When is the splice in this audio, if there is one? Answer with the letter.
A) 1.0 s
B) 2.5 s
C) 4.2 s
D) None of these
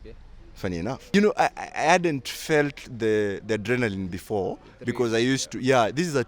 A